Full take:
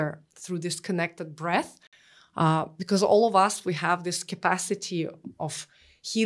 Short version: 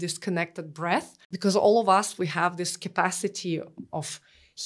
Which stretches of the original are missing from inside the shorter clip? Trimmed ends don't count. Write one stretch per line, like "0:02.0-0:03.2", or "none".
0:01.9-0:02.8